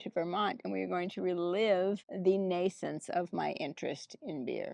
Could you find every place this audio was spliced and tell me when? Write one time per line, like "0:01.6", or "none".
none